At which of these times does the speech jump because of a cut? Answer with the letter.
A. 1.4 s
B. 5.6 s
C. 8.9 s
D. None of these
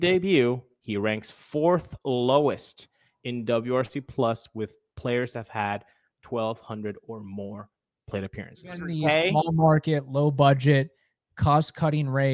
C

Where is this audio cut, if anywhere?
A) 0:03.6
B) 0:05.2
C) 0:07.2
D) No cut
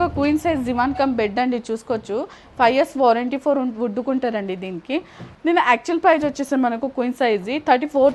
B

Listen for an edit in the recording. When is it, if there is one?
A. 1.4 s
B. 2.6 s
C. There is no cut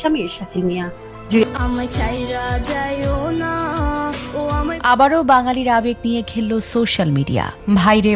A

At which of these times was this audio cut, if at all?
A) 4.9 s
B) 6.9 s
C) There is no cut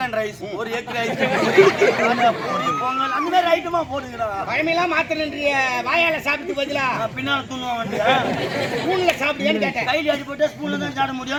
C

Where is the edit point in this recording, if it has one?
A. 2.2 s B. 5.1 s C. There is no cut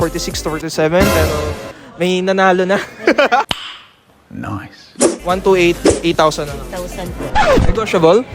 B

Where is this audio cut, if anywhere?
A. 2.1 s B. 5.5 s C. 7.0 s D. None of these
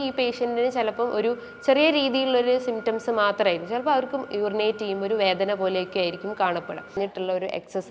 C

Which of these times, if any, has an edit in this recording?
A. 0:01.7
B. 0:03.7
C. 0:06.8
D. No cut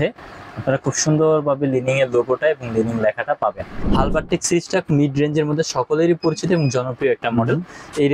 B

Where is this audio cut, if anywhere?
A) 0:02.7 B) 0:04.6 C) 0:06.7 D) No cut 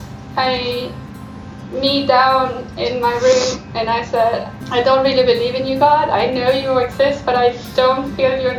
B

